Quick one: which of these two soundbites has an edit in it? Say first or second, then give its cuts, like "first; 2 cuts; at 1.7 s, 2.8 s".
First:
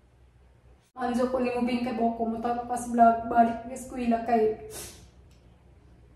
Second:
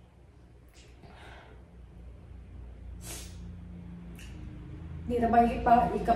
first; 1 cut; at 1.0 s